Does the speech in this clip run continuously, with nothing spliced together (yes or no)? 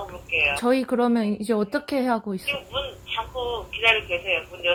yes